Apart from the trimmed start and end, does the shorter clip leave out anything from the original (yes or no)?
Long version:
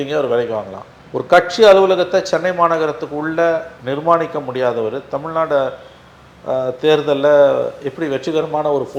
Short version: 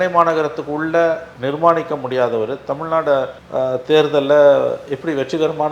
yes